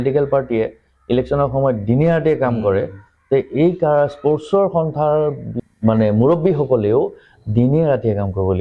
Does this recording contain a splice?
no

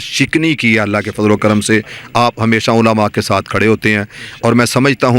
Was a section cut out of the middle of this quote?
no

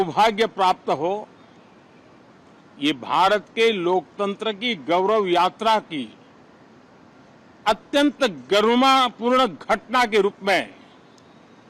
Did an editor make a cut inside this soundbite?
no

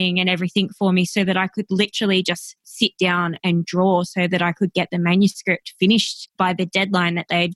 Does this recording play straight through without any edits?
no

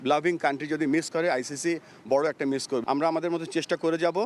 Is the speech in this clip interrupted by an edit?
no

